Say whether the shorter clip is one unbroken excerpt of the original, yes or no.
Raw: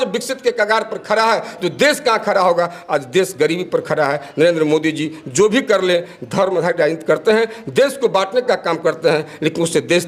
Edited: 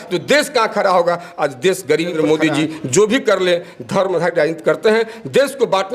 no